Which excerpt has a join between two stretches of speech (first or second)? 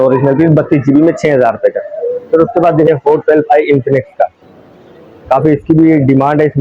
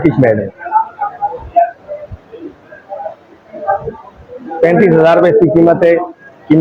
first